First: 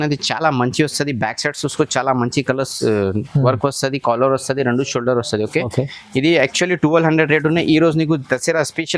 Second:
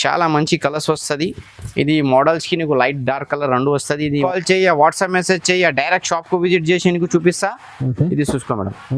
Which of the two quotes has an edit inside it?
second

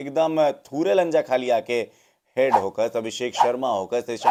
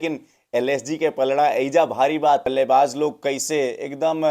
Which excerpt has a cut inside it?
second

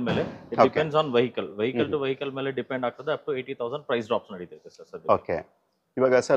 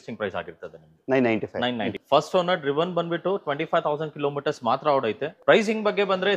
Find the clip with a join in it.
second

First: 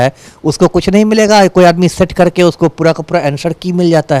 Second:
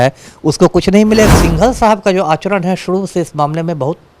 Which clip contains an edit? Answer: second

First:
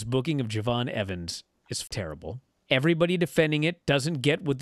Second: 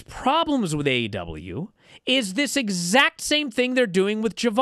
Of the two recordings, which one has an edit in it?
first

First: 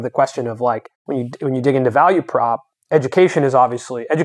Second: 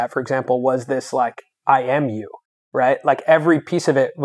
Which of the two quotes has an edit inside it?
first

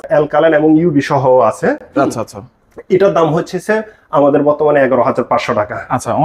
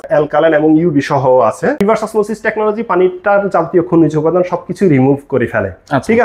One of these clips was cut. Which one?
second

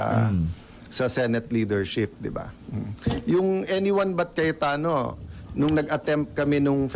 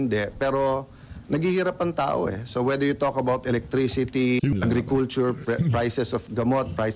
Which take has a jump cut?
second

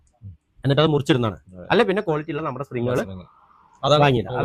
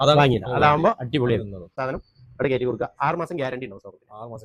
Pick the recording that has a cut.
second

